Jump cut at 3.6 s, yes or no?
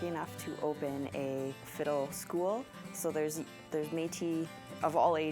no